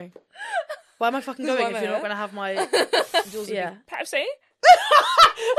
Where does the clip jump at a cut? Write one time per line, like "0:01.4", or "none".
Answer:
0:03.3